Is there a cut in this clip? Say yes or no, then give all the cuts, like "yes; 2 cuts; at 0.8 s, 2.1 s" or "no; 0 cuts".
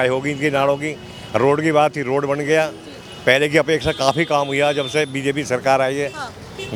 no; 0 cuts